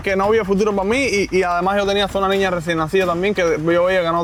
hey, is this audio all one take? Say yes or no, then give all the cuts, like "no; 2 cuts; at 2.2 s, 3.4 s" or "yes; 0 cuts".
yes; 0 cuts